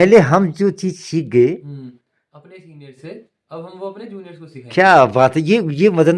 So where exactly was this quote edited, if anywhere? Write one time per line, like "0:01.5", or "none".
none